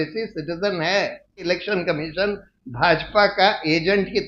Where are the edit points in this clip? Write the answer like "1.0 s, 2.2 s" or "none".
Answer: 1.4 s